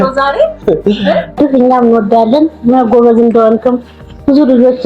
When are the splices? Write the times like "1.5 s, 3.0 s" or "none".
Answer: 1.3 s